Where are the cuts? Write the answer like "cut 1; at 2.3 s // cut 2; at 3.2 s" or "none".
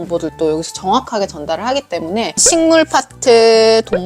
none